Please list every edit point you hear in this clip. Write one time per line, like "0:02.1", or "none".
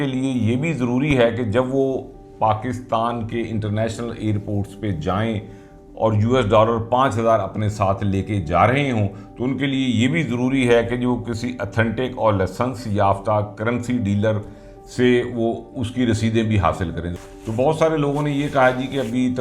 0:17.0

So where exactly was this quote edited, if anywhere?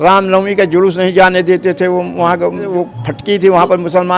0:02.7

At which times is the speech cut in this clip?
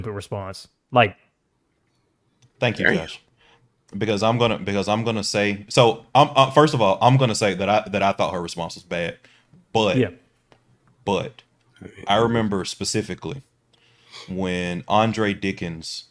none

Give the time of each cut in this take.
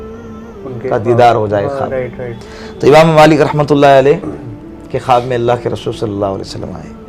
none

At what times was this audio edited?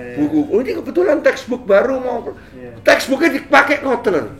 none

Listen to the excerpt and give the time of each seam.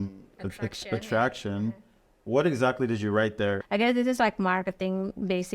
0:03.6

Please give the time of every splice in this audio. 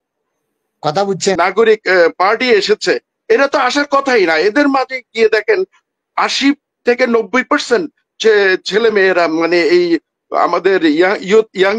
0:01.4

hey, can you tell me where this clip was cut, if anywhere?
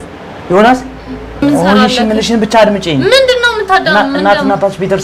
0:01.4

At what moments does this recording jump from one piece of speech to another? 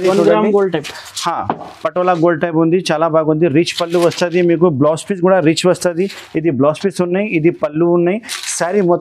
none

